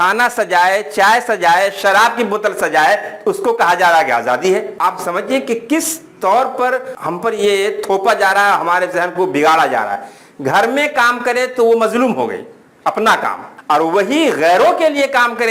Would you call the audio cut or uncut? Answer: cut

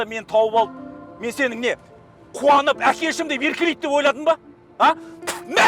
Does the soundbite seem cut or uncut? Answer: uncut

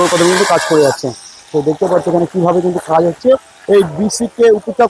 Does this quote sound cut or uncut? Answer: uncut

